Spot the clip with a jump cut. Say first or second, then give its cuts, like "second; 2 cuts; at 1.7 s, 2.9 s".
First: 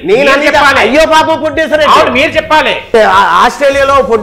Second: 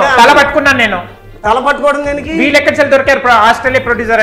first; 1 cut; at 2.9 s